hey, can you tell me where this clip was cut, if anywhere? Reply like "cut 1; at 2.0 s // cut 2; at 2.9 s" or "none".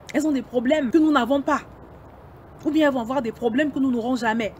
cut 1; at 0.9 s